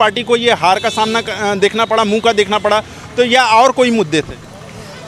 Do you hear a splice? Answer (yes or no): no